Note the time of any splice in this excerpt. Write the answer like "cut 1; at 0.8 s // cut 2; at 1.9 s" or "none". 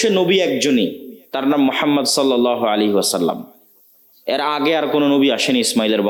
none